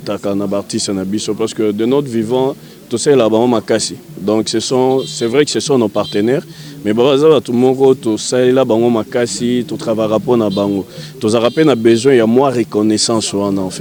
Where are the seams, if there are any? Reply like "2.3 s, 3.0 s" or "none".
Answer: none